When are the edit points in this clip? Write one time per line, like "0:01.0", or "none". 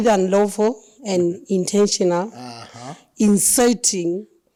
none